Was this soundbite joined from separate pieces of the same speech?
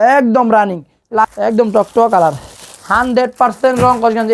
yes; 1 cut; at 1.3 s

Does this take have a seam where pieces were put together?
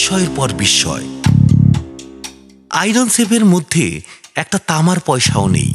no; 0 cuts

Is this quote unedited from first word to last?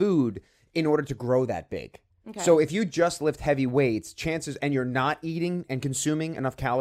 yes; 0 cuts

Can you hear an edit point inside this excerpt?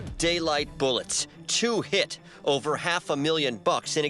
no; 0 cuts

